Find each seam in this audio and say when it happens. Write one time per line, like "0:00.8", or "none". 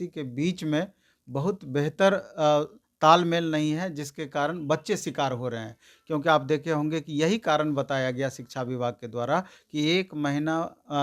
none